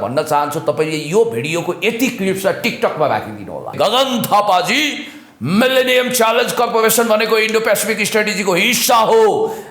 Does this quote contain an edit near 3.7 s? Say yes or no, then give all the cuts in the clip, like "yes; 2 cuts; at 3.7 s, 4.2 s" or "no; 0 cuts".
yes; 1 cut; at 3.7 s